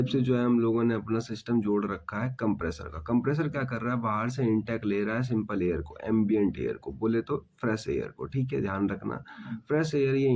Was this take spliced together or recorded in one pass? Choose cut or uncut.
uncut